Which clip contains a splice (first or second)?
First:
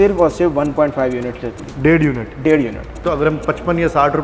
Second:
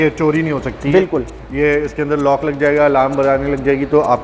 first